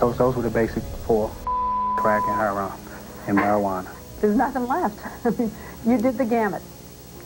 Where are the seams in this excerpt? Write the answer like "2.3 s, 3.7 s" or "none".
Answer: none